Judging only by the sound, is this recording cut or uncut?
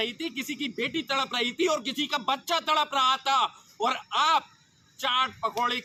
uncut